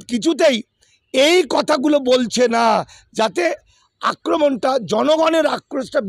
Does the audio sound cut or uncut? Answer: uncut